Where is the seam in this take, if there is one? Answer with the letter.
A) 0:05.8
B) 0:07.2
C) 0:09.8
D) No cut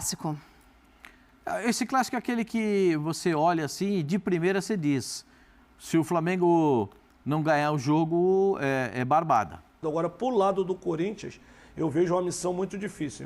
C